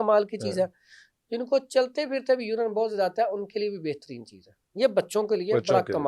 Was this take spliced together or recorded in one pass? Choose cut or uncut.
uncut